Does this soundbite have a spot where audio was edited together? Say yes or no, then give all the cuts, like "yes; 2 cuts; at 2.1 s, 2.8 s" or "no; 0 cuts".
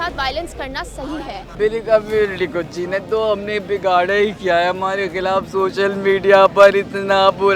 yes; 1 cut; at 1.5 s